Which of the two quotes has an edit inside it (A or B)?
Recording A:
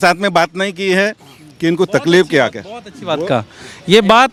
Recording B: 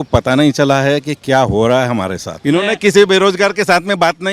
B